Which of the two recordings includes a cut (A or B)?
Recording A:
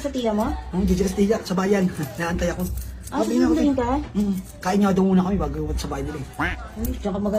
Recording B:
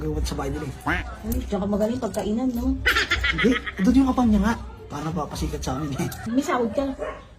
B